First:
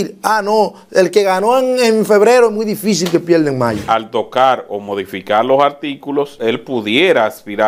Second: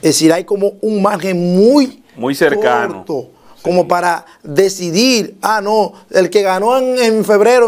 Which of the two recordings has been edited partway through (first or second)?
first